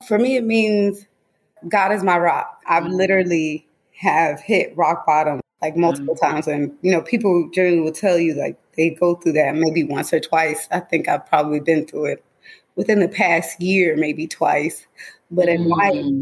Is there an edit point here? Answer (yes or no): no